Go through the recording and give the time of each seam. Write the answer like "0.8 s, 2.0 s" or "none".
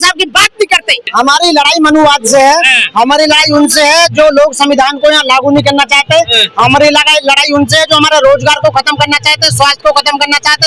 1.0 s